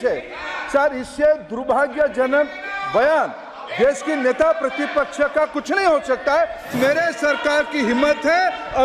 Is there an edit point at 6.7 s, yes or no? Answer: yes